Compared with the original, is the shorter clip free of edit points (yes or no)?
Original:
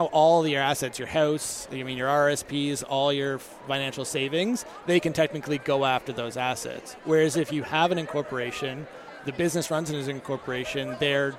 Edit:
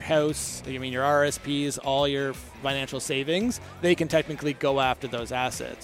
yes